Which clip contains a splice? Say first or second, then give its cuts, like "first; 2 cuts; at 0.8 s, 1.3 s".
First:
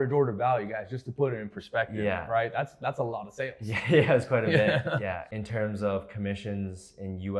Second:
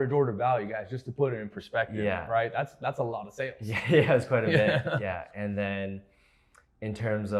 first; 1 cut; at 5.3 s